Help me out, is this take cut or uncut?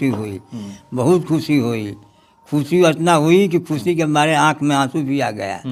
uncut